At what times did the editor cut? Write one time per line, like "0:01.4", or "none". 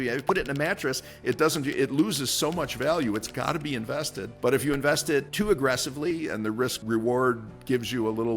0:04.2
0:05.3
0:06.8

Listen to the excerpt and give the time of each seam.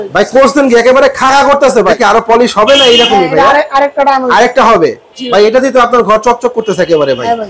0:01.9

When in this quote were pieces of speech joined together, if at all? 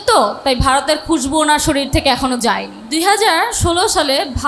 0:02.8

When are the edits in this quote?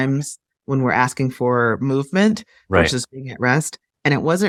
none

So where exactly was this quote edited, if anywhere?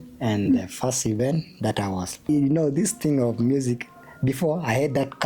0:02.2

